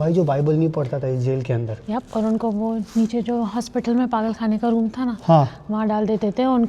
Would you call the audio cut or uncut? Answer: uncut